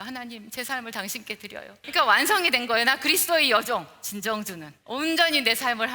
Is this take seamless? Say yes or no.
no